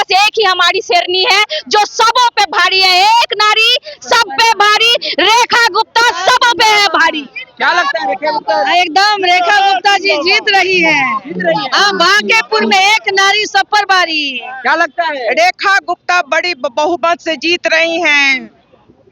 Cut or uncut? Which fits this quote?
uncut